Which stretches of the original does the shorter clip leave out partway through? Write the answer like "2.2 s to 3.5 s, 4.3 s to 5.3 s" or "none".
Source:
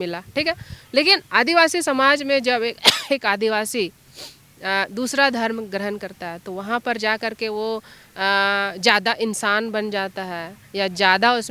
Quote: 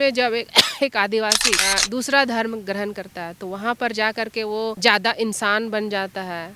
3.8 s to 4.6 s, 7.8 s to 8.8 s